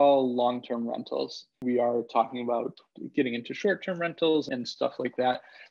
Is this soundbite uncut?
no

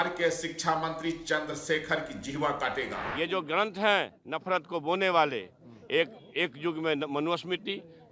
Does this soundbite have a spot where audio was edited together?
yes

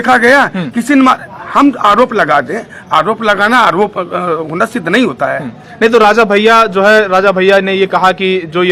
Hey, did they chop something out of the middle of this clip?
no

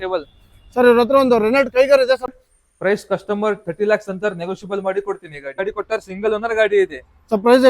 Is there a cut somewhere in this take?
yes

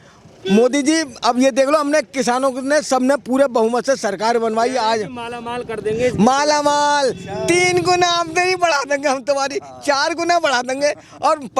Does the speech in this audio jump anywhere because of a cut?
no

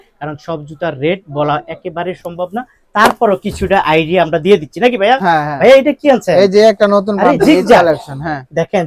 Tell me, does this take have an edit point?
no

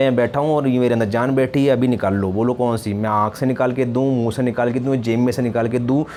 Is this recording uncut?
yes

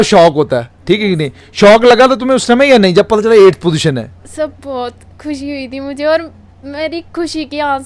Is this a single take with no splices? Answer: yes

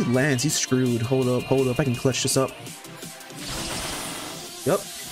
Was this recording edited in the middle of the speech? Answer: no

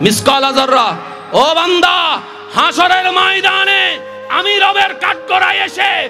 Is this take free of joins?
yes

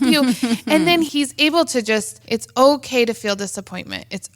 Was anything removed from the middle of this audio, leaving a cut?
yes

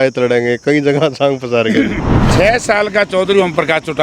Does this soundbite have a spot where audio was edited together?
yes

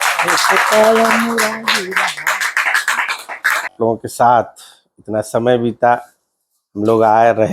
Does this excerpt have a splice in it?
yes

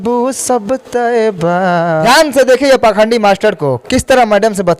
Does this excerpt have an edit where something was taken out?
yes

